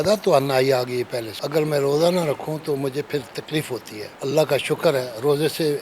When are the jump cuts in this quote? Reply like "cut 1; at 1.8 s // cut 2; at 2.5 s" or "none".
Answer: cut 1; at 1.4 s // cut 2; at 4.0 s